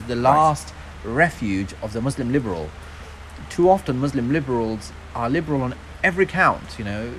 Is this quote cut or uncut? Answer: uncut